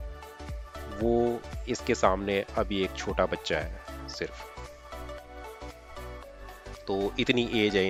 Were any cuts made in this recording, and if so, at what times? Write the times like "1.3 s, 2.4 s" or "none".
none

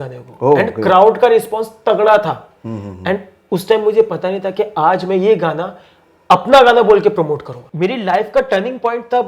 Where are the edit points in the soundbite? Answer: 7.5 s

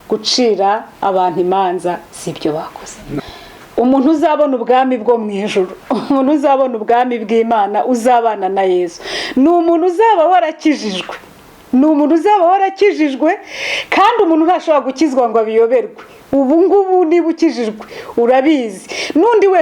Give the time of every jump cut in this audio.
3.2 s

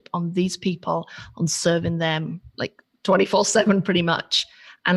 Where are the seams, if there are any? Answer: none

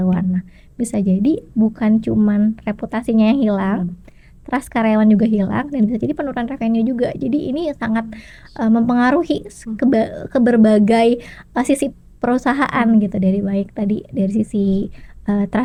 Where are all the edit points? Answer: none

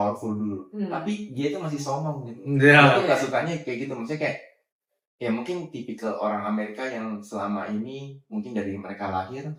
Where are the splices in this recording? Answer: none

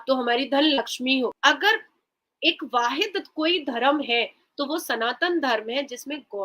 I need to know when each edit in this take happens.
1.4 s

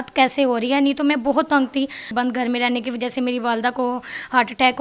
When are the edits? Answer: 2.1 s

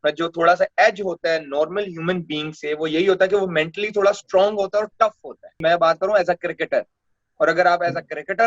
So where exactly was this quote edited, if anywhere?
5.6 s

